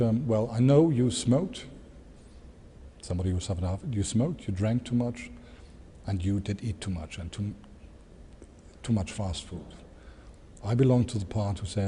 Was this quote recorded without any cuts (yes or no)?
yes